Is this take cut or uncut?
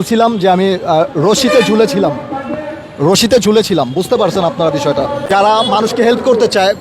cut